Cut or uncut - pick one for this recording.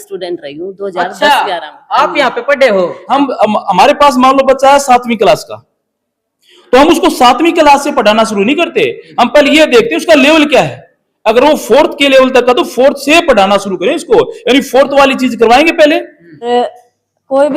cut